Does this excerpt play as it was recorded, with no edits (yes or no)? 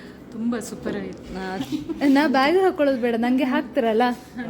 no